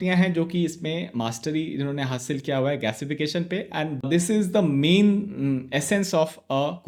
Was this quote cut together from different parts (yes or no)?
no